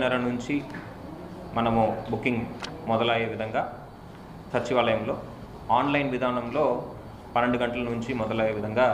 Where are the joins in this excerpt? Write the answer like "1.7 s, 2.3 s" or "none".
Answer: none